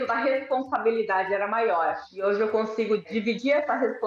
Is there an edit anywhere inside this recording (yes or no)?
yes